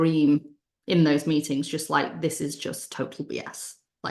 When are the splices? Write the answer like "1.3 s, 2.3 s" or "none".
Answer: none